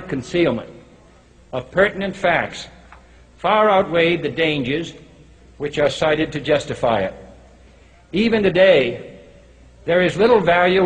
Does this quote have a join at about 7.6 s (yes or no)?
no